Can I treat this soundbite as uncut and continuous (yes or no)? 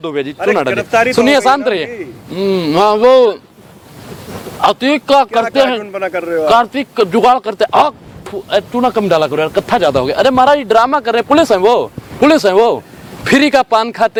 yes